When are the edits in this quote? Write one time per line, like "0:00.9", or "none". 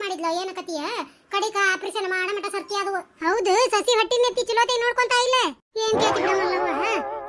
0:03.1